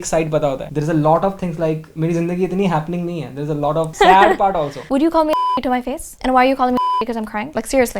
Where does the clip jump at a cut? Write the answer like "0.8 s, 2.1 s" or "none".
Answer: 3.9 s, 4.8 s

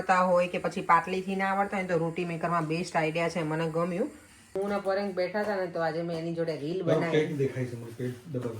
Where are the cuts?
4.5 s

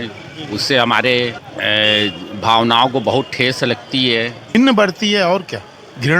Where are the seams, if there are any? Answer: 1.5 s, 4.5 s

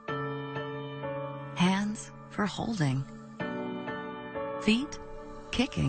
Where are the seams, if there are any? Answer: 4.1 s

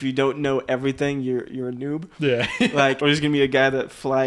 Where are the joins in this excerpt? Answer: 3.0 s

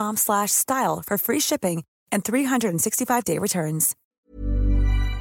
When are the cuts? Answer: 4.2 s

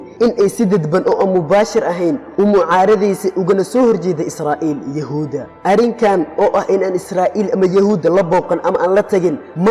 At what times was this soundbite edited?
none

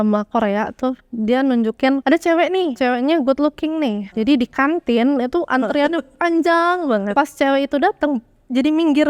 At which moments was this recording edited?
2.0 s, 2.7 s, 4.0 s, 7.1 s

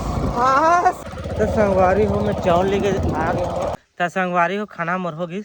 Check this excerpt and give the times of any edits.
1.0 s, 3.7 s

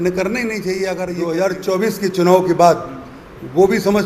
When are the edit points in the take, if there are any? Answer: 1.1 s

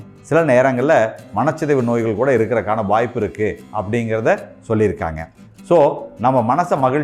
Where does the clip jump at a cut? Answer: none

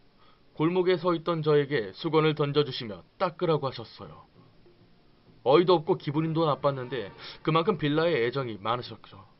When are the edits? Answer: 8.0 s

